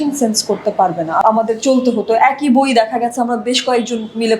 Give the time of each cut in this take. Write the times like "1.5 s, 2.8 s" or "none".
1.2 s